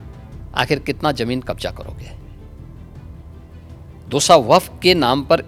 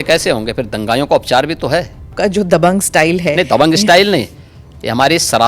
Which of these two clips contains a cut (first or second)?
second